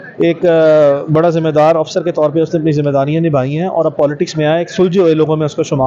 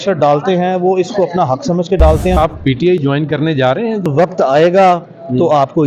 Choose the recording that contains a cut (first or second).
second